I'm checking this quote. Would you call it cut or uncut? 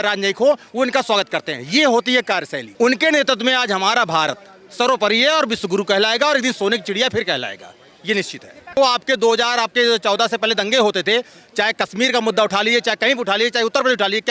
cut